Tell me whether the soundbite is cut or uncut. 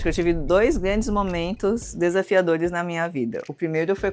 uncut